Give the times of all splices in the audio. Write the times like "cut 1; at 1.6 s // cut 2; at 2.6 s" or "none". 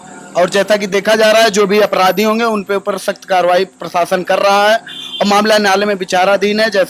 none